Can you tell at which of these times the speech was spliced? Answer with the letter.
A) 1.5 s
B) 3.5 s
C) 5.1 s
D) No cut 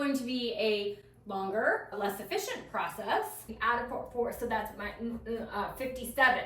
B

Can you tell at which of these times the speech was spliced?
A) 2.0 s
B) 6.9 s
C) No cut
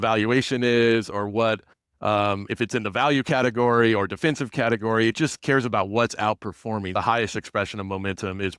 B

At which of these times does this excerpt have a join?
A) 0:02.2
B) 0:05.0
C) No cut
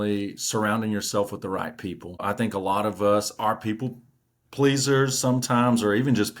A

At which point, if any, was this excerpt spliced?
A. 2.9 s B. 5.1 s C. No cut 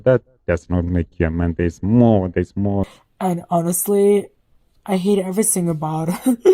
A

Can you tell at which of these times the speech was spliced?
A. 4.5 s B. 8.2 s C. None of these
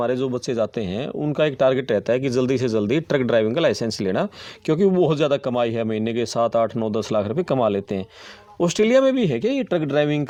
C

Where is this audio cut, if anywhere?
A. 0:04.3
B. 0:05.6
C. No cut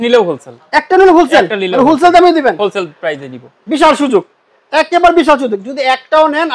C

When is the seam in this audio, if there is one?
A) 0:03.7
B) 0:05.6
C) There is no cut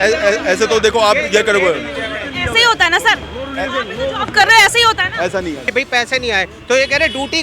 B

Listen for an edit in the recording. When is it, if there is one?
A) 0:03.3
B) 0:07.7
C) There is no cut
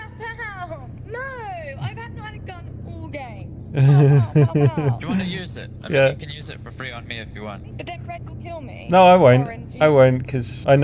B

